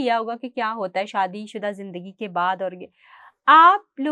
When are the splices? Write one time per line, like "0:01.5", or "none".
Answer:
none